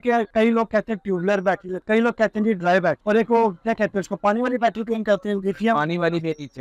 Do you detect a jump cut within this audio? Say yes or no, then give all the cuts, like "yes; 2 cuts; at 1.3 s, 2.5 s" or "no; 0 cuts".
no; 0 cuts